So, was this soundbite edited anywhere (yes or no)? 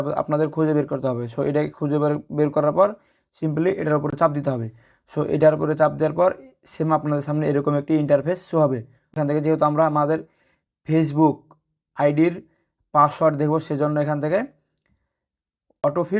no